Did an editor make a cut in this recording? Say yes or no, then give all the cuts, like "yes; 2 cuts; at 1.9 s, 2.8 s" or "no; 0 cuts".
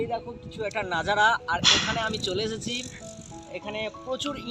no; 0 cuts